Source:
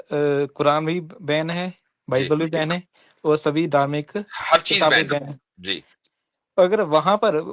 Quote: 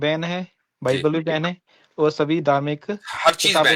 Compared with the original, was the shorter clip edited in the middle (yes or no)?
no